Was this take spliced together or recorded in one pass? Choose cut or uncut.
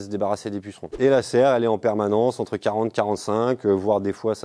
cut